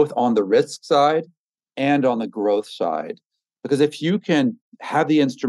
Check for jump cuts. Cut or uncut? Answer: uncut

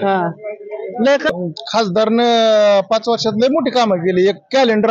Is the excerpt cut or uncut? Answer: cut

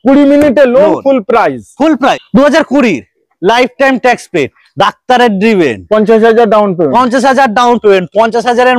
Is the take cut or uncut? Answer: cut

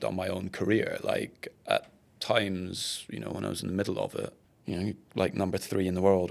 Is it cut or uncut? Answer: cut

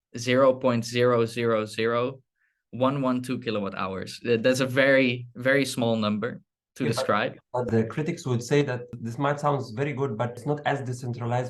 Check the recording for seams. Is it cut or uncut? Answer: cut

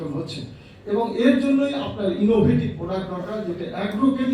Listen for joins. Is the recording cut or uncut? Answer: uncut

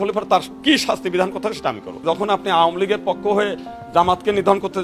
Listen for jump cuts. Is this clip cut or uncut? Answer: cut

